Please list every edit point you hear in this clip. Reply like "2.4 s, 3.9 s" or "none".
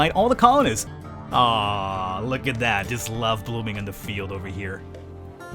0.9 s